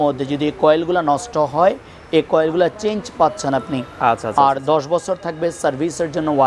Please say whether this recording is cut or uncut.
uncut